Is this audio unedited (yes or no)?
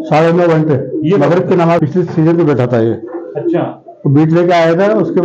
yes